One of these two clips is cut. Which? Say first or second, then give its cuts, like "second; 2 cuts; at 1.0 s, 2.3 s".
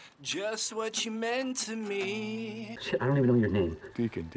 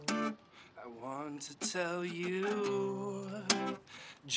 first; 1 cut; at 2.7 s